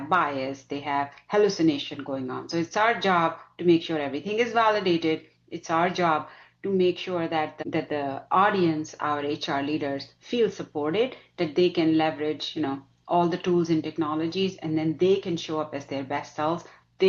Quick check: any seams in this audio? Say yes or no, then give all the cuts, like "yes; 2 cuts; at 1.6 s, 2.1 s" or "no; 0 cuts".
yes; 1 cut; at 7.6 s